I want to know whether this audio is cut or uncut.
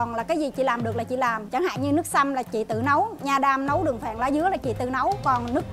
cut